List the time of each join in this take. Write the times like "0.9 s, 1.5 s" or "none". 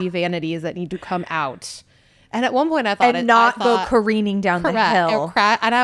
none